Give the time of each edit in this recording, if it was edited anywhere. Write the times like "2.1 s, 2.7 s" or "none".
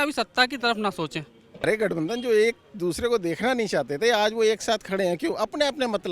1.6 s